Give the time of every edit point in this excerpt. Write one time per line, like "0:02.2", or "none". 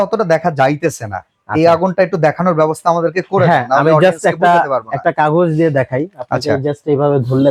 none

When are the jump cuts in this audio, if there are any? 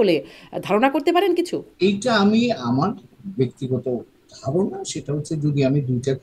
0:01.6

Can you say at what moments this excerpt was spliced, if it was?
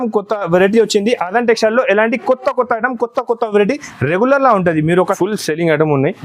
0:05.1

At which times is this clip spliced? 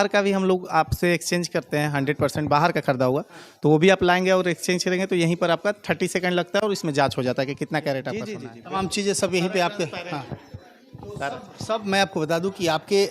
0:08.4

